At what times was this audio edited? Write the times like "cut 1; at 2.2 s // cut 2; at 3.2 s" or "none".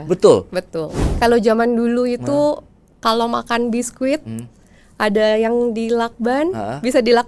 cut 1; at 1.0 s